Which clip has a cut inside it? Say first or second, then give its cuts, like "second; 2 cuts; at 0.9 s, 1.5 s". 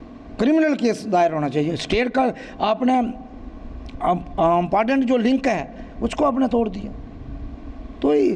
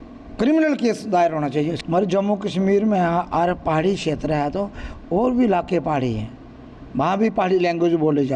second; 1 cut; at 1.8 s